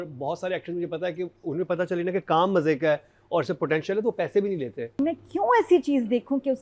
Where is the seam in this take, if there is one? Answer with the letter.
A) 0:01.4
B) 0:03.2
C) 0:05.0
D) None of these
C